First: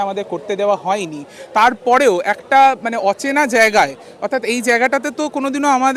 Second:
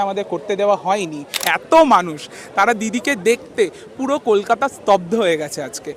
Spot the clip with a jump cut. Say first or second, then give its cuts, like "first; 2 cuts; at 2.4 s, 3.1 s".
second; 1 cut; at 1.3 s